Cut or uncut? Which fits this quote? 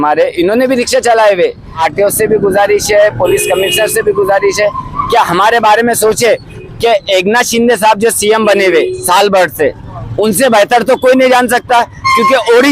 cut